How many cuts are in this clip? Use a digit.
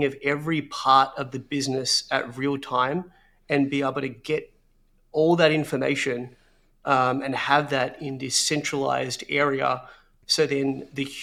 0